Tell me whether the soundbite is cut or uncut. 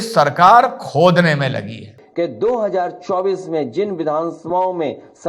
cut